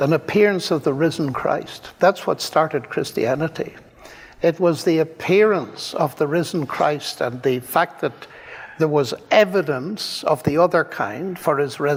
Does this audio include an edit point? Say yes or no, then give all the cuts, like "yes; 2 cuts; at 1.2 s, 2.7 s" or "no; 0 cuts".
no; 0 cuts